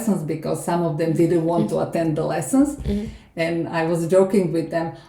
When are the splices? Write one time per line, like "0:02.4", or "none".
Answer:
none